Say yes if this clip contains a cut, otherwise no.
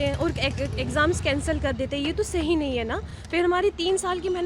no